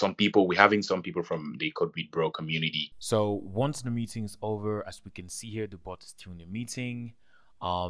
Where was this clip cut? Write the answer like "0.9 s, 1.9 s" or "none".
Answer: 2.8 s